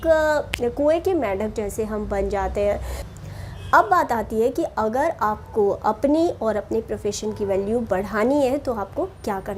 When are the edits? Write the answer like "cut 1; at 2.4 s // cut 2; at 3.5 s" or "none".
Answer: cut 1; at 3.0 s

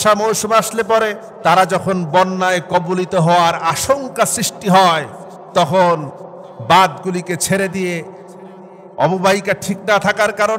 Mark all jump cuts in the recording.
cut 1; at 1.3 s

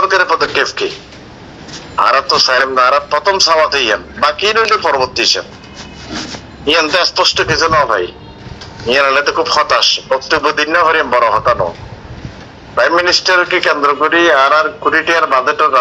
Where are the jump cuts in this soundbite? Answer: none

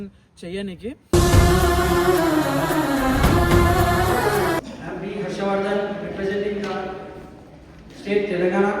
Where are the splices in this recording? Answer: cut 1; at 4.6 s

